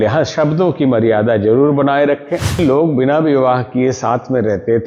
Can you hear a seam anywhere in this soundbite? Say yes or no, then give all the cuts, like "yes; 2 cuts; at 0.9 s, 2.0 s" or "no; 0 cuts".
yes; 1 cut; at 2.6 s